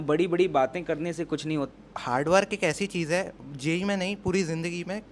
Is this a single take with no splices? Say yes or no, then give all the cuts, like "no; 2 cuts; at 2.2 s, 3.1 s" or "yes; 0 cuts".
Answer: no; 1 cut; at 1.7 s